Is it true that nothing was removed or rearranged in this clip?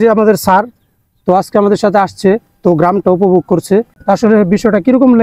no; 1 cut; at 3.9 s

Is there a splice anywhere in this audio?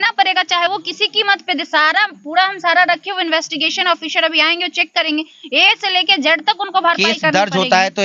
no; 0 cuts

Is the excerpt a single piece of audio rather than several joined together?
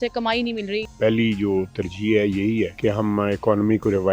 no; 2 cuts; at 0.9 s, 2.7 s

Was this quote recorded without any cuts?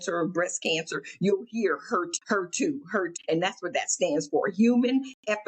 no; 2 cuts; at 2.1 s, 3.1 s

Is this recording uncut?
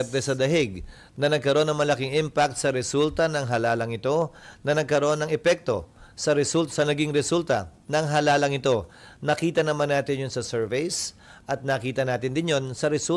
yes; 0 cuts

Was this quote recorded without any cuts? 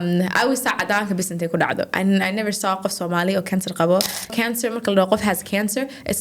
no; 1 cut; at 4.3 s

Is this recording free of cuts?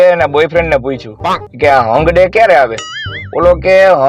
yes; 0 cuts

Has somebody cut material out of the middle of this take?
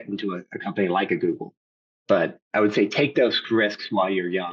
yes; 1 cut; at 2.4 s

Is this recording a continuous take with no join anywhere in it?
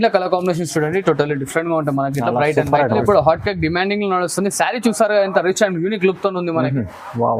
no; 1 cut; at 3.0 s

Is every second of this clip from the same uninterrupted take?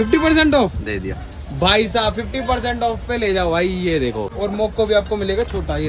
no; 1 cut; at 4.3 s

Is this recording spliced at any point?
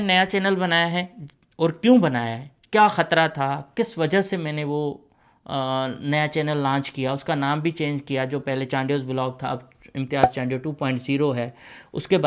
no; 0 cuts

